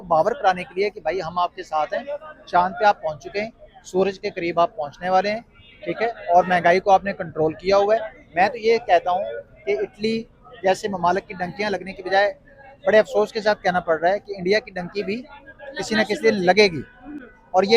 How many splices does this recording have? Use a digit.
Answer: 0